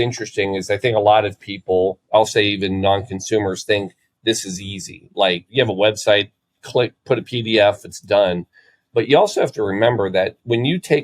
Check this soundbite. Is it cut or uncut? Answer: cut